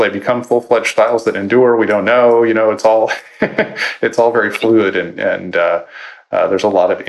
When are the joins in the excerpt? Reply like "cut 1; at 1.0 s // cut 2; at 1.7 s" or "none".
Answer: none